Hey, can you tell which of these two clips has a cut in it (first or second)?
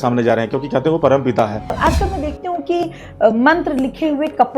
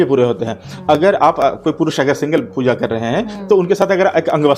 first